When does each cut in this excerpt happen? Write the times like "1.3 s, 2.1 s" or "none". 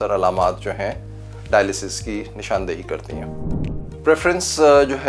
3.5 s